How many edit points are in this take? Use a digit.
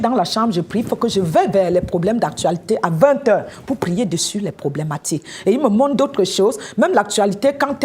0